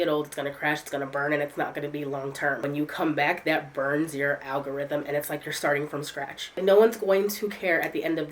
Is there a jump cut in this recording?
yes; 2 cuts; at 2.6 s, 6.6 s

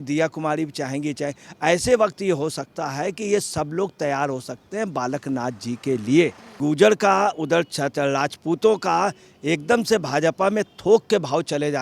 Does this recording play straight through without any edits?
no; 1 cut; at 6.6 s

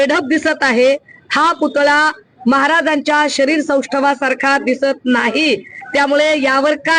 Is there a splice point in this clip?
no; 0 cuts

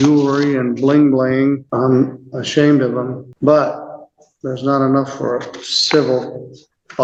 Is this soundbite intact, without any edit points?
yes; 0 cuts

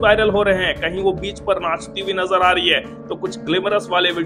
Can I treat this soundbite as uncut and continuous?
yes; 0 cuts

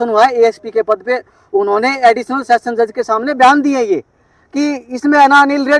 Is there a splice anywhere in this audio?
no; 0 cuts

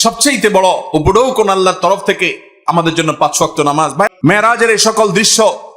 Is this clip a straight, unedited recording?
no; 1 cut; at 4.1 s

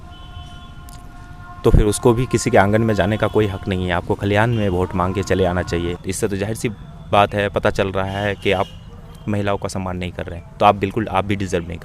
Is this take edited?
yes; 1 cut; at 6.0 s

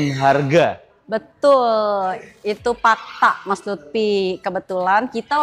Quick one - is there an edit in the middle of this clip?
no; 0 cuts

